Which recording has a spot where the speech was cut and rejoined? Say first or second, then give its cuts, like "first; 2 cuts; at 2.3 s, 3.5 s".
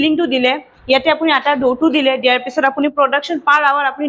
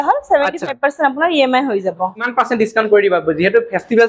second; 1 cut; at 2.3 s